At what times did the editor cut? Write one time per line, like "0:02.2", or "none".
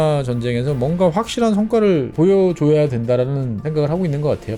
0:02.1
0:03.6